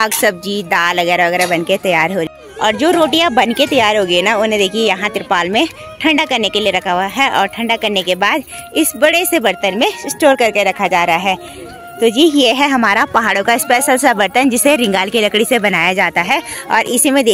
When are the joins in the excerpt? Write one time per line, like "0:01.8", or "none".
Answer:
0:02.3